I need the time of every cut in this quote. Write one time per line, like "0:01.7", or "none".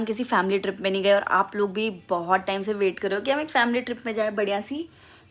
none